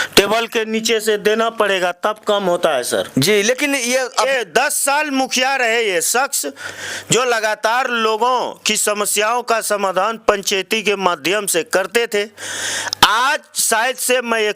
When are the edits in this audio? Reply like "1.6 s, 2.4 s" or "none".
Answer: 4.1 s